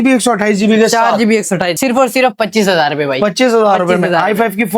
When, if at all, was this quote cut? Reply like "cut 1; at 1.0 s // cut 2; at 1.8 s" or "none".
cut 1; at 1.8 s